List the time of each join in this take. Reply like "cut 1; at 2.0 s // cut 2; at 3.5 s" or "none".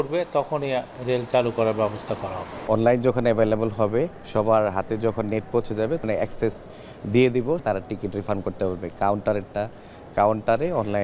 cut 1; at 0.9 s // cut 2; at 2.6 s // cut 3; at 4.2 s // cut 4; at 6.0 s // cut 5; at 7.6 s

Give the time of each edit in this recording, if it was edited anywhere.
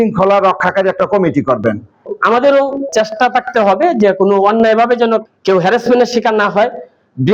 cut 1; at 2.1 s

